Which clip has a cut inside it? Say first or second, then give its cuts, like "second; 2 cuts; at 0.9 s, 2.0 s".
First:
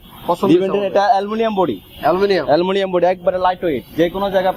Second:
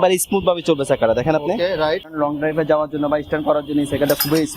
second; 1 cut; at 2.1 s